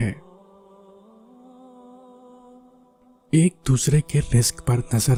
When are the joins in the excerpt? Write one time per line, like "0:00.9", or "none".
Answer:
none